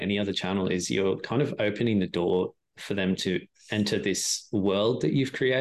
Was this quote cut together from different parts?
no; 0 cuts

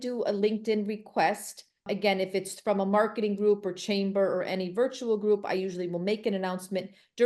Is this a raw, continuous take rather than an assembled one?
yes; 0 cuts

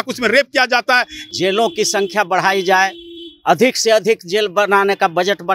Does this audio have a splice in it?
yes; 1 cut; at 1.1 s

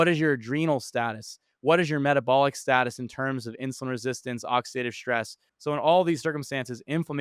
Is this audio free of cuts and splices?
no; 1 cut; at 5.5 s

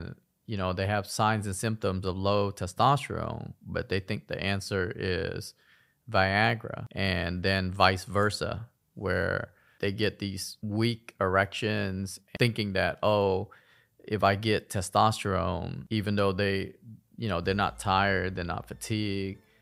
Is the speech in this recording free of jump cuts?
no; 2 cuts; at 9.6 s, 12.2 s

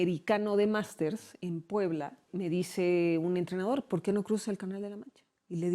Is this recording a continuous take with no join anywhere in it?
no; 1 cut; at 2.3 s

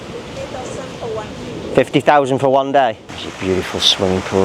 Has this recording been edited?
yes; 1 cut; at 3.1 s

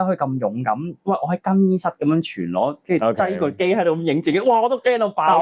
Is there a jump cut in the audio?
no; 0 cuts

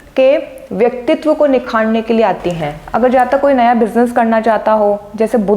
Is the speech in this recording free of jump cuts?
no; 1 cut; at 2.8 s

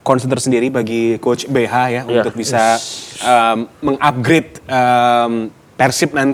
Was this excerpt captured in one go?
yes; 0 cuts

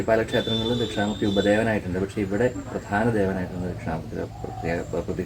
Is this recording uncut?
yes; 0 cuts

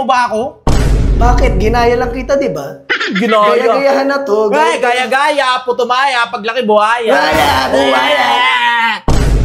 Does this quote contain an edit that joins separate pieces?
no; 0 cuts

